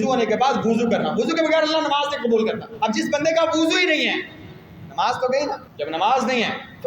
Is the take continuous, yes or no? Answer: no